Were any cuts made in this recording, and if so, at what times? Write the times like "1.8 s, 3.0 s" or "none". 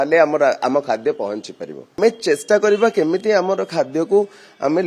2.0 s

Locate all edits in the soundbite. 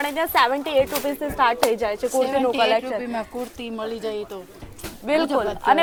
none

